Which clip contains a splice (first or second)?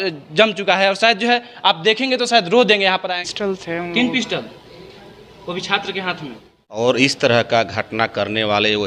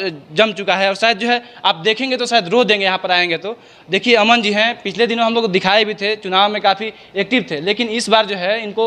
first